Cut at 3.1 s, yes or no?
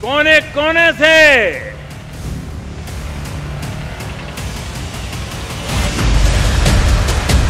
no